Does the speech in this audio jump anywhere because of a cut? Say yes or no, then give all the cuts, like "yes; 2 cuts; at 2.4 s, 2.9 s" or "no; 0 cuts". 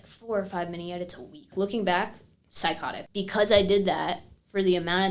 yes; 2 cuts; at 1.5 s, 2.9 s